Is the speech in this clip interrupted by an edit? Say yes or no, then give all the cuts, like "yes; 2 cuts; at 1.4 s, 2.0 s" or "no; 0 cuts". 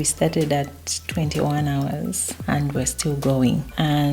no; 0 cuts